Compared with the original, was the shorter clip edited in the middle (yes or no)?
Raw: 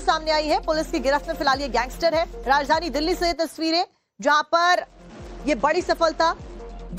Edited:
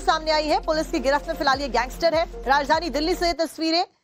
no